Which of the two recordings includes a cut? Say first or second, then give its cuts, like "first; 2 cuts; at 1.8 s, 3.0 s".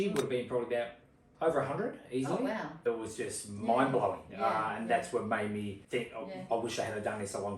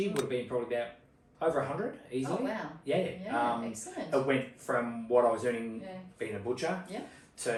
first; 2 cuts; at 2.8 s, 5.8 s